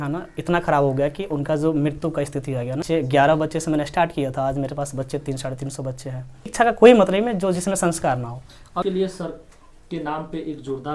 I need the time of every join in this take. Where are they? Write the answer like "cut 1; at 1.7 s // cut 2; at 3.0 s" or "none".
cut 1; at 2.8 s // cut 2; at 6.5 s // cut 3; at 8.8 s